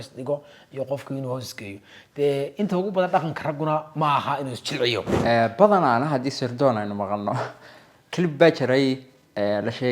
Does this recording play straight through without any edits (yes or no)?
no